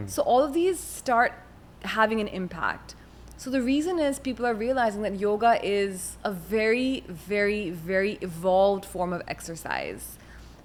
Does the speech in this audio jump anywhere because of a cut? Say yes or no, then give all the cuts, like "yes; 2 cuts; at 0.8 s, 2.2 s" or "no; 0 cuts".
no; 0 cuts